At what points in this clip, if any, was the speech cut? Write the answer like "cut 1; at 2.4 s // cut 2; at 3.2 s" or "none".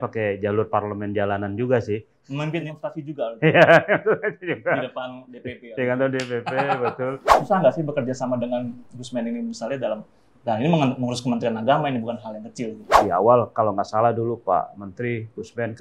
cut 1; at 2.7 s // cut 2; at 7.3 s // cut 3; at 12.9 s

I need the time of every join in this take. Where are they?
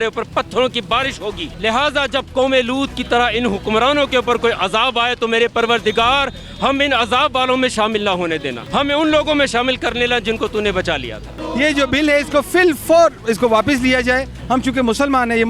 cut 1; at 1.5 s // cut 2; at 8.6 s // cut 3; at 11.4 s // cut 4; at 14.4 s

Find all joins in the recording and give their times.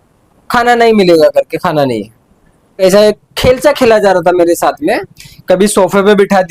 cut 1; at 2.8 s

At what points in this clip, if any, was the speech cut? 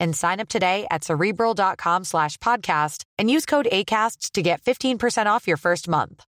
none

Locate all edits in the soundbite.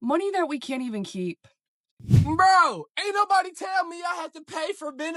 cut 1; at 1.9 s

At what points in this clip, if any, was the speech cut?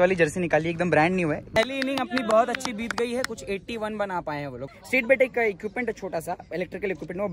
cut 1; at 1.5 s // cut 2; at 4.7 s

